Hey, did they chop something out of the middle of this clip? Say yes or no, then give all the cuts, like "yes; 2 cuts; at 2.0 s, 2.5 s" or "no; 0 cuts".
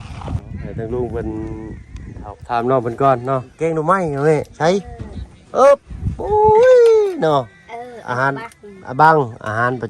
yes; 1 cut; at 3.5 s